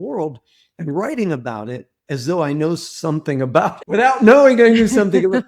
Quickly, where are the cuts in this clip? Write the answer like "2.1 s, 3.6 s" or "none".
3.8 s